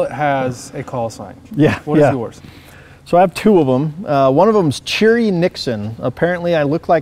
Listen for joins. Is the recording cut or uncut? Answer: uncut